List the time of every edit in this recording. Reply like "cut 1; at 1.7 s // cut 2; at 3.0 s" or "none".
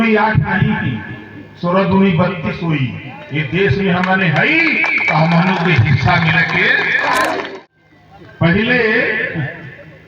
cut 1; at 7.5 s